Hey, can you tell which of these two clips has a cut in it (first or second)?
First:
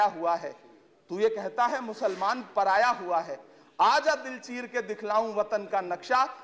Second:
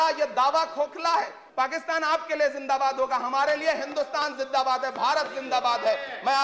second